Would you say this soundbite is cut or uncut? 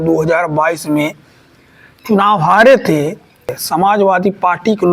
cut